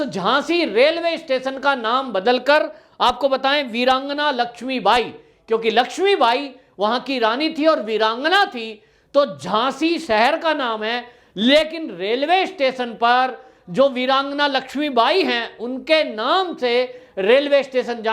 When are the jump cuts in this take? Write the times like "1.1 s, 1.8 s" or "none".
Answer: none